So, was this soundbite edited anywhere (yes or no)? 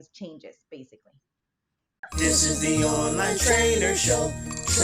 yes